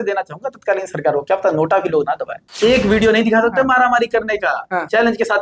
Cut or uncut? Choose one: cut